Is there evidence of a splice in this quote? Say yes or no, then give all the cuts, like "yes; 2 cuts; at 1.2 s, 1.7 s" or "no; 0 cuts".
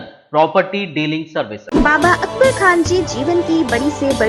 yes; 1 cut; at 1.6 s